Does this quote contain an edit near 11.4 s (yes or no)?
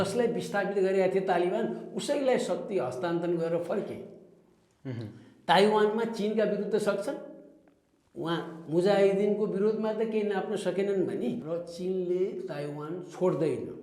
yes